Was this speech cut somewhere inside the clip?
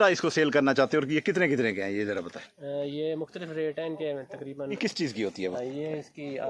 yes; 1 cut; at 4.8 s

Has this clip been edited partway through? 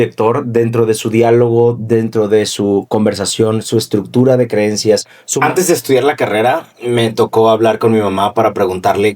yes; 1 cut; at 5.2 s

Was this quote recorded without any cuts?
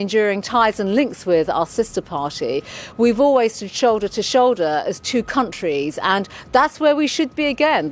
yes; 0 cuts

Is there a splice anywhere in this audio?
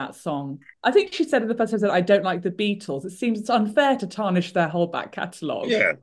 no; 0 cuts

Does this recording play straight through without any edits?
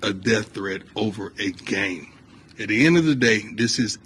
yes; 0 cuts

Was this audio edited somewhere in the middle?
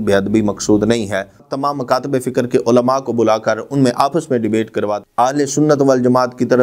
yes; 2 cuts; at 1.4 s, 5.0 s

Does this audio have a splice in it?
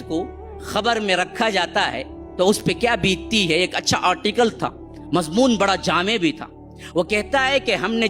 no; 0 cuts

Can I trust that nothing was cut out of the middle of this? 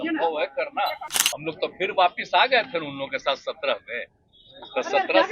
no; 1 cut; at 1.1 s

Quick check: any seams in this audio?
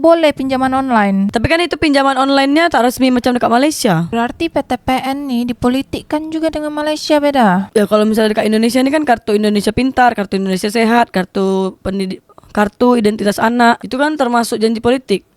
yes; 1 cut; at 4.1 s

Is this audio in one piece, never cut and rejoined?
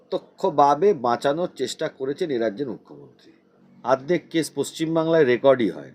no; 1 cut; at 3.8 s

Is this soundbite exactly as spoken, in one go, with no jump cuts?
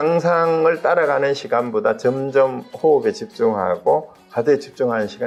yes; 0 cuts

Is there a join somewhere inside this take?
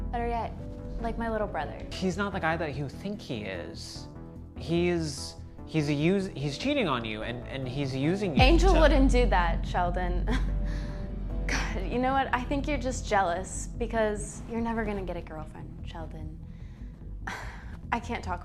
yes; 1 cut; at 1.9 s

